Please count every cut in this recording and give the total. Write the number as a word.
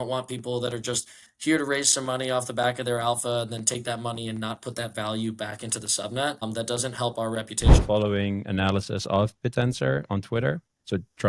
two